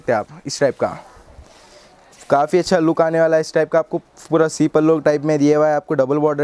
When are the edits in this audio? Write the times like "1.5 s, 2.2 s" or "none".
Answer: none